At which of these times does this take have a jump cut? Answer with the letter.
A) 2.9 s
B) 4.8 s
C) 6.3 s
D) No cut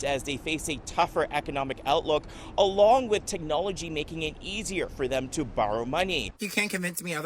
C